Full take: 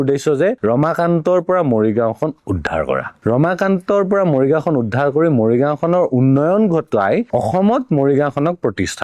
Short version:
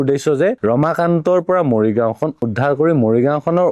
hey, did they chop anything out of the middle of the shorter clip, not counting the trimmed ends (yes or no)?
yes